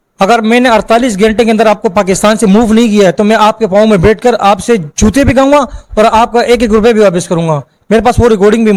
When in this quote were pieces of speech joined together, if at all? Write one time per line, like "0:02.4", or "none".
none

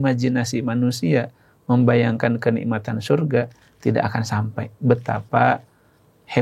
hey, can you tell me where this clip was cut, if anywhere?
none

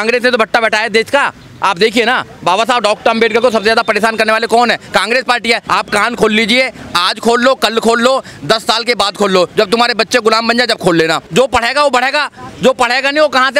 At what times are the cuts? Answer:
0:05.6
0:11.2

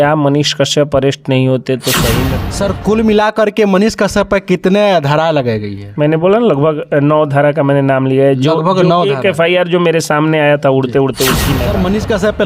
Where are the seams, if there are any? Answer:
0:02.4
0:11.5

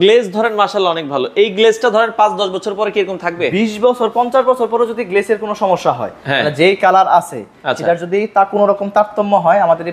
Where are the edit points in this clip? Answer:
none

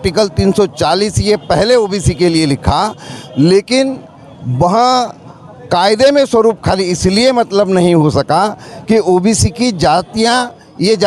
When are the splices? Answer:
none

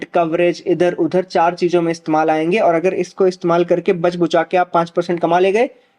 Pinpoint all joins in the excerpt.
none

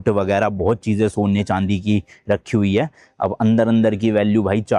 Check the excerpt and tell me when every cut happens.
none

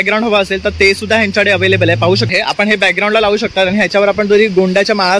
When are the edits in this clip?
0:02.3

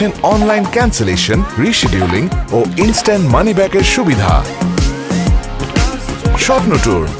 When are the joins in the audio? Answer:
none

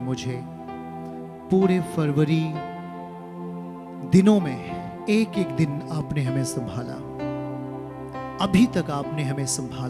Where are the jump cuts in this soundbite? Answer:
none

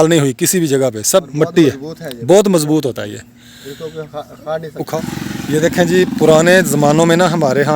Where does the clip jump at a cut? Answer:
0:01.5
0:04.9

